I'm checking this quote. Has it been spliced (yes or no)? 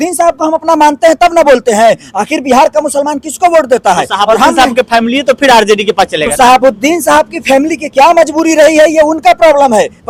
no